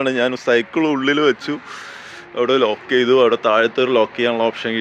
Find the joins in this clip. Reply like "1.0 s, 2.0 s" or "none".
none